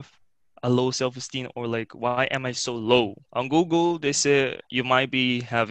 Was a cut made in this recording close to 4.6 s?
yes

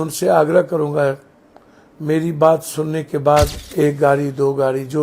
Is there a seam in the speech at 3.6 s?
yes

